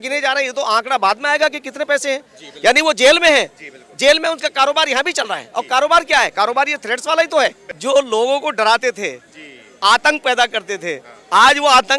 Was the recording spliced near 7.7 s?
yes; 1 cut; at 7.7 s

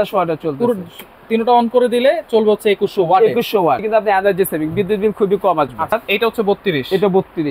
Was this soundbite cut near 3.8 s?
yes; 2 cuts; at 3.8 s, 6.0 s

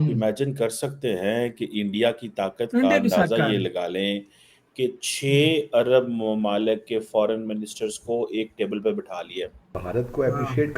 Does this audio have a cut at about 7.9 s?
no; 1 cut; at 9.8 s

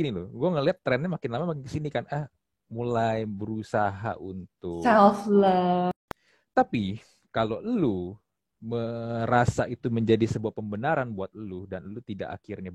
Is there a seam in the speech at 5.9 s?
yes; 1 cut; at 5.9 s

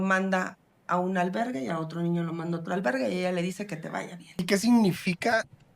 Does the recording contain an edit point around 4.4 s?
yes; 1 cut; at 4.4 s

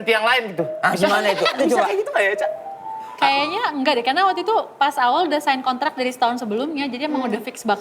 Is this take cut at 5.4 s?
no; 1 cut; at 1.6 s

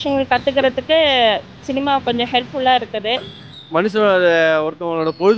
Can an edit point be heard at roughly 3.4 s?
yes; 1 cut; at 3.4 s

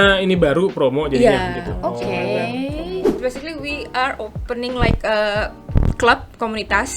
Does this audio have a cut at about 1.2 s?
no; 1 cut; at 3.1 s

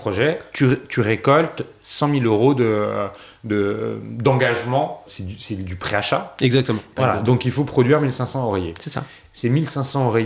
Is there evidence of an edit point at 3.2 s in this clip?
no; 2 cuts; at 5.0 s, 6.9 s

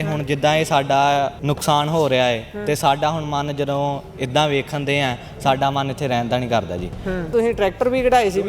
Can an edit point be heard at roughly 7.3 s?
yes; 2 cuts; at 1.4 s, 7.3 s

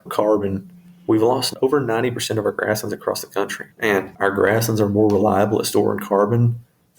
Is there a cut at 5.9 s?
no; 1 cut; at 1.5 s

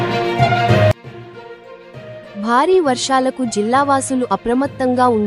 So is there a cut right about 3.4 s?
no; 1 cut; at 1.0 s

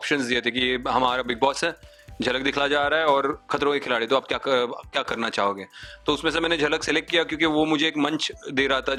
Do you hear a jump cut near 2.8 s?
no; 0 cuts

